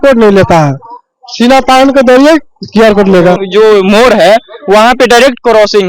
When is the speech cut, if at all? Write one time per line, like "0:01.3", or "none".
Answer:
0:03.4